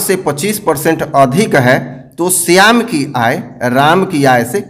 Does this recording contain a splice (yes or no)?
no